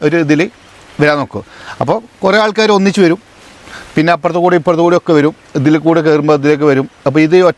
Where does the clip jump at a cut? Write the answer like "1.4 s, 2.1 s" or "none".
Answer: none